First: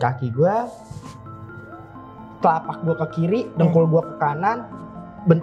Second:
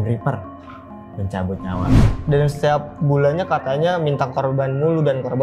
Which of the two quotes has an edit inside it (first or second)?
second